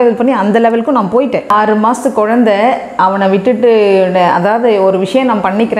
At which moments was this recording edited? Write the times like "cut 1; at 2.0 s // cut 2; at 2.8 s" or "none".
none